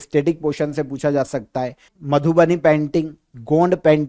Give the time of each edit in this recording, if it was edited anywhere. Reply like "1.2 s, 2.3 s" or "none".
1.9 s